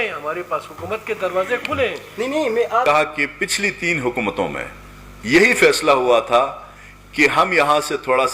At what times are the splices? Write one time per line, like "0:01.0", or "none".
0:03.0